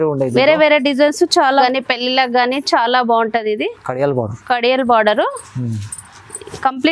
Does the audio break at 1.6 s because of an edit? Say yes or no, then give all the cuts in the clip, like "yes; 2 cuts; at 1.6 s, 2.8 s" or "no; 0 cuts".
yes; 1 cut; at 1.6 s